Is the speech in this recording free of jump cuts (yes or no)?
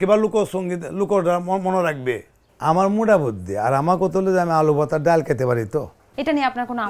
no